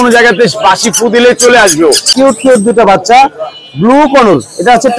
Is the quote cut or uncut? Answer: cut